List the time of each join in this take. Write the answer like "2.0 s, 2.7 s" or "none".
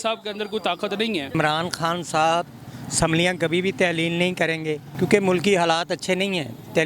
1.3 s, 4.9 s